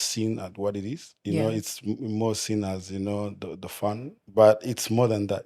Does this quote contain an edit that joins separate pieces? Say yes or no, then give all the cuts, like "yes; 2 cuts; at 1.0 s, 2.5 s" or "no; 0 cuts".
yes; 1 cut; at 4.1 s